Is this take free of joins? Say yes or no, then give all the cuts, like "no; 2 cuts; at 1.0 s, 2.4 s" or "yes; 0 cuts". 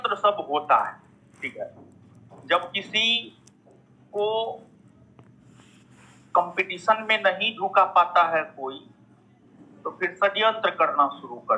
yes; 0 cuts